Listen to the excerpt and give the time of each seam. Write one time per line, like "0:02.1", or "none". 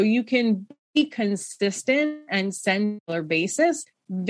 0:03.0